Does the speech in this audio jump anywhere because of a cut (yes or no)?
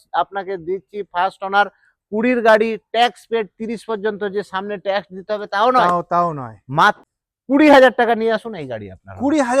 yes